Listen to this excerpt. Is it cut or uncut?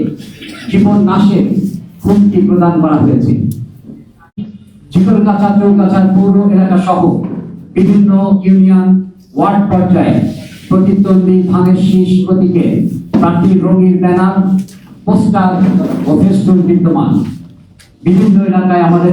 cut